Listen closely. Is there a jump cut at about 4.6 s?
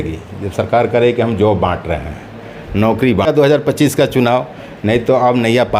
no; 1 cut; at 3.2 s

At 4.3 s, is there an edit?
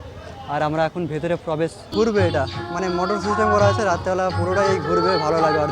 no; 1 cut; at 1.9 s

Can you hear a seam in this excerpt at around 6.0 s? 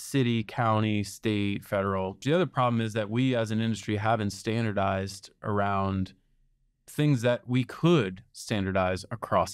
no; 1 cut; at 2.2 s

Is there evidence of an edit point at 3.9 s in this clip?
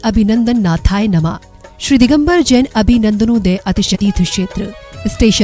yes; 1 cut; at 3.9 s

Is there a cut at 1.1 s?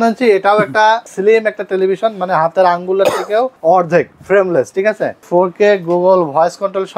yes; 3 cuts; at 1.1 s, 3.5 s, 5.2 s

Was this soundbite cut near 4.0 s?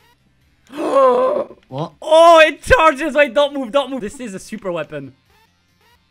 yes; 1 cut; at 4.0 s

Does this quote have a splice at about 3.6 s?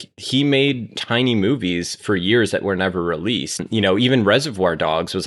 yes; 2 cuts; at 1.0 s, 3.6 s

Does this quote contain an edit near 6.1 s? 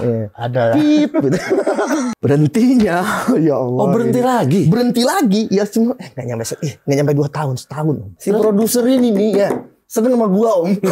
no; 2 cuts; at 2.1 s, 8.2 s

